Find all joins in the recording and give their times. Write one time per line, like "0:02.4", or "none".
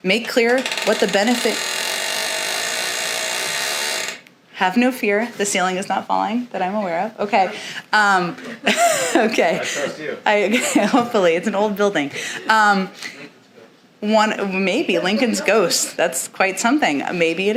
none